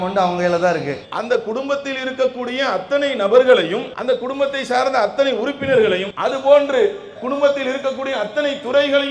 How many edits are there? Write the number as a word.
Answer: two